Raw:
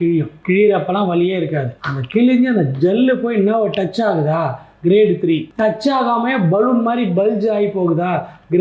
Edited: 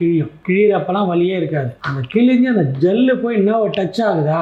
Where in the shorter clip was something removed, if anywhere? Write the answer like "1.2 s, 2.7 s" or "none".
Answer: none